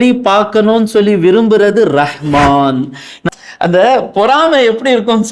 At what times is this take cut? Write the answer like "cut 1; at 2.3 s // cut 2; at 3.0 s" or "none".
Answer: cut 1; at 3.2 s